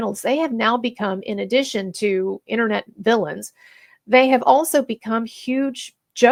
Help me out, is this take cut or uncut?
uncut